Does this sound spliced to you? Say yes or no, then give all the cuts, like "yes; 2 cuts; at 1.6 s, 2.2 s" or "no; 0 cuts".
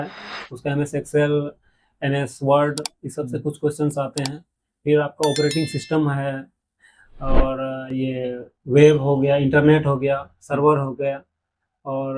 no; 0 cuts